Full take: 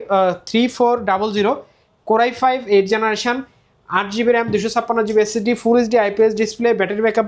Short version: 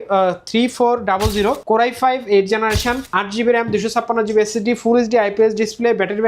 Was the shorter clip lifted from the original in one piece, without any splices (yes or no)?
no